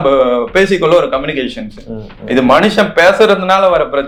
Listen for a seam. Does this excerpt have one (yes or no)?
no